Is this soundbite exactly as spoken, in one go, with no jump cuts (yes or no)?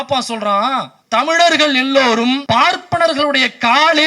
no